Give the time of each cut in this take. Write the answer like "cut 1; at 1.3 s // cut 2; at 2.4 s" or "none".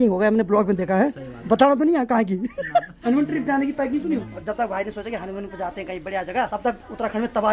cut 1; at 1.3 s // cut 2; at 2.9 s // cut 3; at 4.3 s // cut 4; at 6.5 s